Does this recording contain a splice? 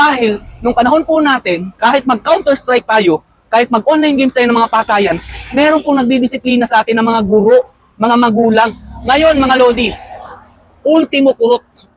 no; 0 cuts

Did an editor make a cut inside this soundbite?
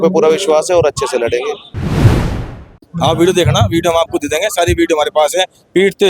yes; 2 cuts; at 1.6 s, 2.7 s

